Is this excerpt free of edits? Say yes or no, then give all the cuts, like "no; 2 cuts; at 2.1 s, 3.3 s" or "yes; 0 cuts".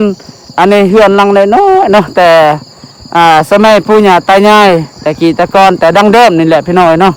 yes; 0 cuts